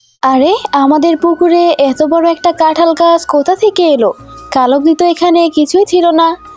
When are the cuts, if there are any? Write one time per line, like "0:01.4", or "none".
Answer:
none